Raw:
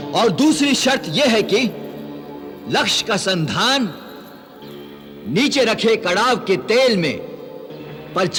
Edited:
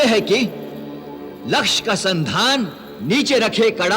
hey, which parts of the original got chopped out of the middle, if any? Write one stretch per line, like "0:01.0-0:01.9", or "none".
0:04.1-0:05.1